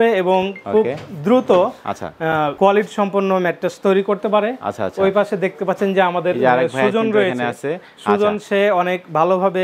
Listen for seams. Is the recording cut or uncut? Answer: uncut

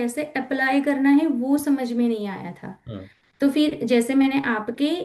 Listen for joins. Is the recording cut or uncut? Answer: uncut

